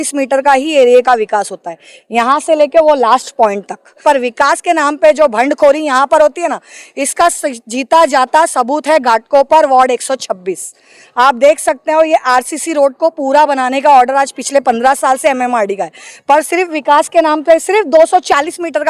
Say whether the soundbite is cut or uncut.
cut